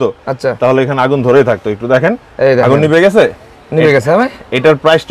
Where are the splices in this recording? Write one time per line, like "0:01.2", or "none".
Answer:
none